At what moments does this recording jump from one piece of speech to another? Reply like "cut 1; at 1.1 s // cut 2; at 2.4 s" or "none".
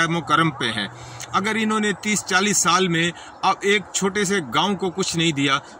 none

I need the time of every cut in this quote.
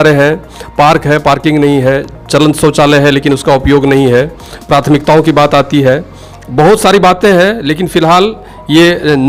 none

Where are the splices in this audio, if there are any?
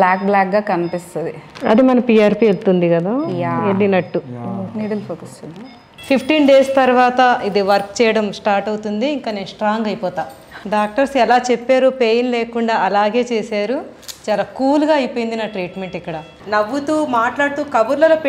cut 1; at 5.9 s // cut 2; at 10.5 s // cut 3; at 16.2 s

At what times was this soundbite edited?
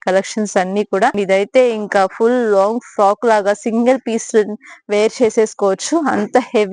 cut 1; at 1.1 s

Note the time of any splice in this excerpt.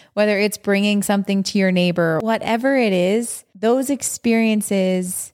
cut 1; at 2.2 s // cut 2; at 3.4 s

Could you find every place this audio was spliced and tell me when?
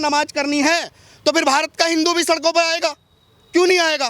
none

